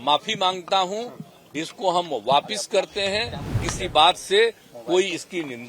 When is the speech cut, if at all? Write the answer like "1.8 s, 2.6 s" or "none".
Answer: 3.6 s